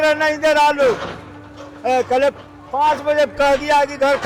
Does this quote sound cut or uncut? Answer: uncut